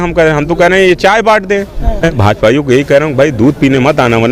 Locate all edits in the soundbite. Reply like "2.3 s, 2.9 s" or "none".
2.0 s